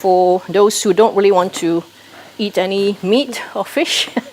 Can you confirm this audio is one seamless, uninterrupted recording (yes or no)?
yes